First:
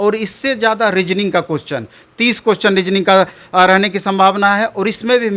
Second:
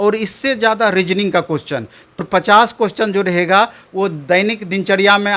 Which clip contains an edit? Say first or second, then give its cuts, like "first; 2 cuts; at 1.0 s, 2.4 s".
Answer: second; 1 cut; at 2.2 s